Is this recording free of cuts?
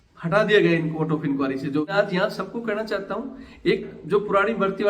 no; 1 cut; at 1.9 s

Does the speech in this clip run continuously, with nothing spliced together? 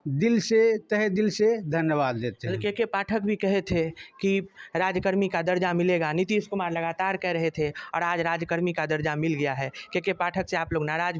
yes; 0 cuts

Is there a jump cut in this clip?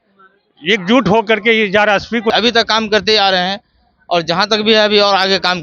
yes; 1 cut; at 2.3 s

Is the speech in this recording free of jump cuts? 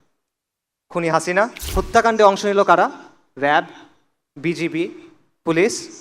no; 1 cut; at 1.6 s

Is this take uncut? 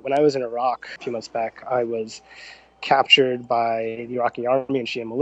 no; 1 cut; at 0.9 s

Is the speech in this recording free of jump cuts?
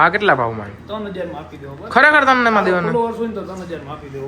yes; 0 cuts

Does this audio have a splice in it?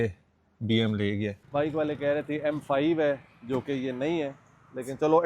yes; 1 cut; at 1.4 s

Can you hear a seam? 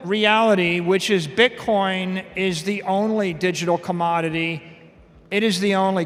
no; 0 cuts

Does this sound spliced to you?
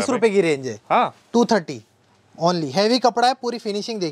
no; 0 cuts

